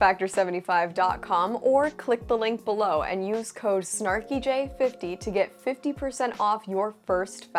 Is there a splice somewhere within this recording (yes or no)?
no